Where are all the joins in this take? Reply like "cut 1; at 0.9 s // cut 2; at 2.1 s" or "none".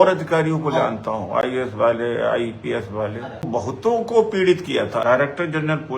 cut 1; at 3.5 s // cut 2; at 5.0 s